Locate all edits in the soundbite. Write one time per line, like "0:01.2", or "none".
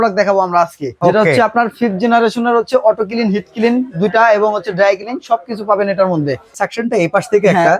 0:00.9
0:06.5